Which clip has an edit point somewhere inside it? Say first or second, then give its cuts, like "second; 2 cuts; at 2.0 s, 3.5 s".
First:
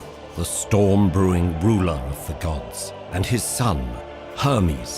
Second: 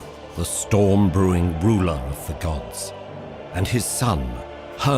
first; 1 cut; at 3.0 s